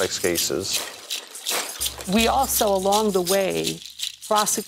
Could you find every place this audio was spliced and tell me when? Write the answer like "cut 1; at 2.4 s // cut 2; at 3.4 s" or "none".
cut 1; at 1.3 s